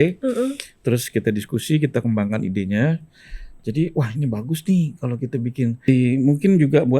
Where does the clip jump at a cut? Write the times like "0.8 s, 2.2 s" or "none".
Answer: 5.9 s